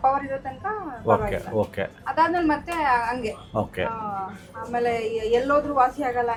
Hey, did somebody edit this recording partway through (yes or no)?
no